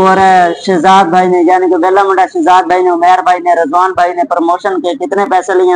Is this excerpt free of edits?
yes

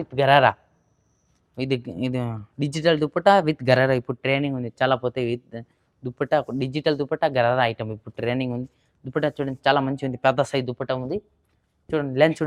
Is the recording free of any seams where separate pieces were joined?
yes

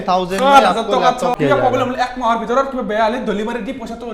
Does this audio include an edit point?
yes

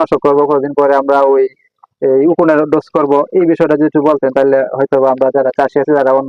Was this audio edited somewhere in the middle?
no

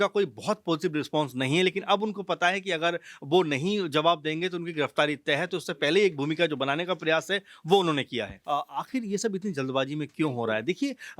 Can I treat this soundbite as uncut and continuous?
no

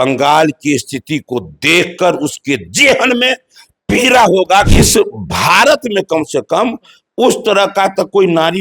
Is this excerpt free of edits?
no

